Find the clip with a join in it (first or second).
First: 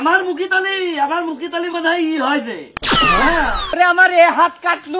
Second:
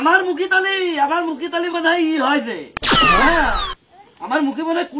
first